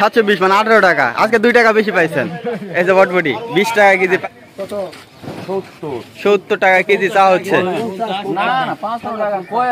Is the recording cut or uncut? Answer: cut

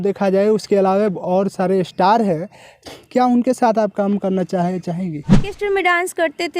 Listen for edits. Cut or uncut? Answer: cut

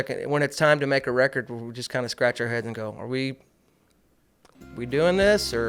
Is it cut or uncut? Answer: uncut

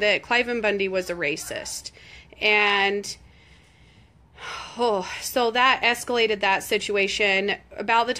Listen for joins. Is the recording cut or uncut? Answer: cut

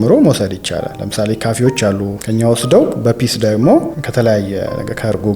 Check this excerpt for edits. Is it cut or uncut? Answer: cut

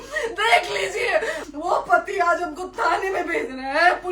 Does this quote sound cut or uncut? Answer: cut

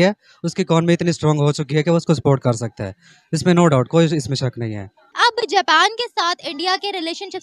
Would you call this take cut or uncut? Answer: uncut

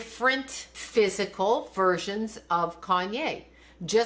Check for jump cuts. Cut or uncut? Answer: uncut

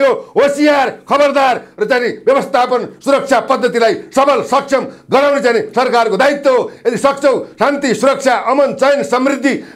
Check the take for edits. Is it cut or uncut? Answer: uncut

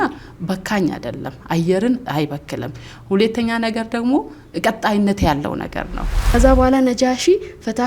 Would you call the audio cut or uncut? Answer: cut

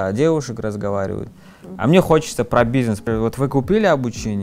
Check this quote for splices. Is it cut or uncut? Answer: cut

